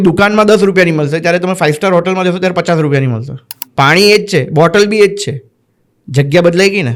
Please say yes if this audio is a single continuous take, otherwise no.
yes